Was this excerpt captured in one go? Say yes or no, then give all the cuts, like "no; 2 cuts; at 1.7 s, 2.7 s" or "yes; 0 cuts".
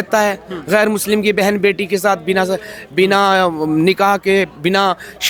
yes; 0 cuts